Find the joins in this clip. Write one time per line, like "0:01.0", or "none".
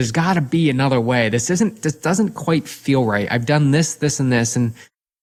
none